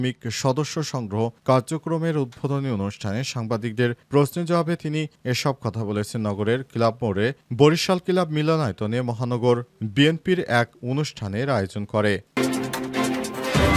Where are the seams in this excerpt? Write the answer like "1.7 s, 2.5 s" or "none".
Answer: 12.3 s